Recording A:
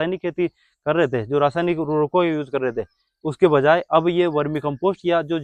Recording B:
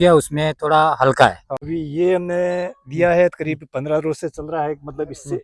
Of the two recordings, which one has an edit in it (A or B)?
B